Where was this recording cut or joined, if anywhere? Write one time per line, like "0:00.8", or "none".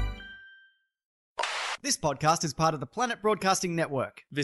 0:01.5